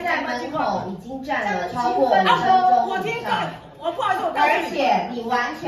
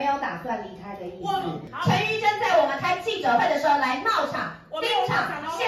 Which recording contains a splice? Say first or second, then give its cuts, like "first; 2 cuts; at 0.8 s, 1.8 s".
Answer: second; 1 cut; at 1.7 s